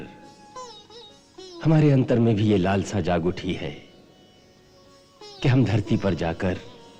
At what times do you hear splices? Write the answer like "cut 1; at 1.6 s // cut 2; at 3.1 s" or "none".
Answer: none